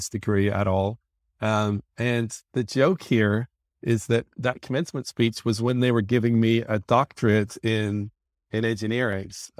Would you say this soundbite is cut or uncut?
uncut